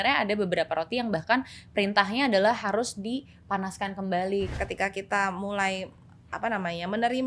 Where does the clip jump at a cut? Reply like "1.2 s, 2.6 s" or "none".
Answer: 4.5 s

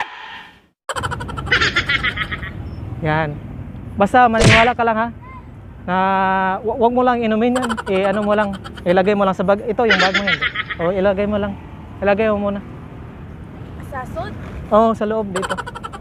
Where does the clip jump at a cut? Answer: none

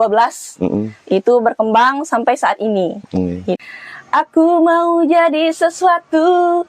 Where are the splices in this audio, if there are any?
3.6 s

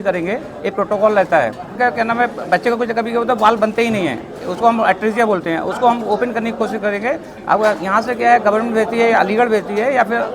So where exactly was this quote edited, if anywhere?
1.7 s

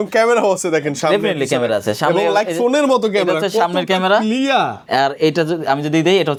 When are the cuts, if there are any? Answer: none

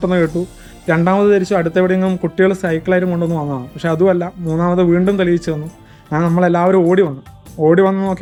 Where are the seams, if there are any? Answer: none

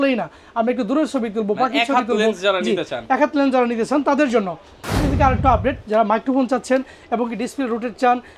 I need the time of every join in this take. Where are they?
4.9 s

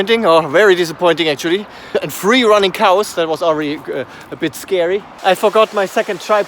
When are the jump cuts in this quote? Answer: 1.9 s, 5.1 s

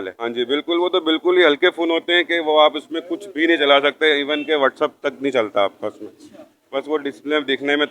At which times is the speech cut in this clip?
none

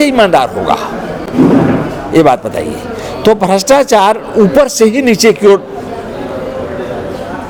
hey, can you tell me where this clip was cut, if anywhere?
none

